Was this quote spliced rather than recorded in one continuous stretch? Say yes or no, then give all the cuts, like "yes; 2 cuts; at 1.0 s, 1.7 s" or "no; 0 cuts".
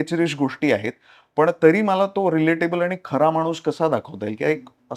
no; 0 cuts